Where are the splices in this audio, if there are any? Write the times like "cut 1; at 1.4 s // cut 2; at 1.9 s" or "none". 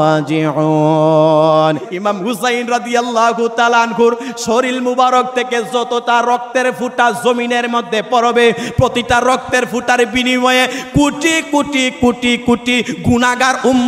cut 1; at 1.9 s